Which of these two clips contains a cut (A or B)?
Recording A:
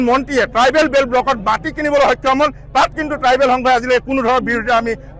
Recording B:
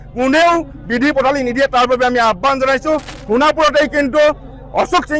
B